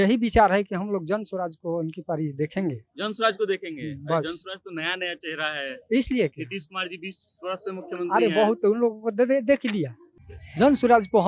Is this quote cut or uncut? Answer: cut